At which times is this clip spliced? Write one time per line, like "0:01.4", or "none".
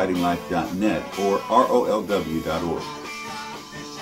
none